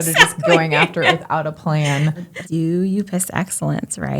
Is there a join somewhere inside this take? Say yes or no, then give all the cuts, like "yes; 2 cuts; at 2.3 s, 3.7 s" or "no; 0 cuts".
yes; 1 cut; at 2.3 s